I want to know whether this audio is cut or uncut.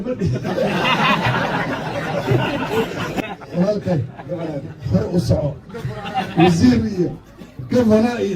cut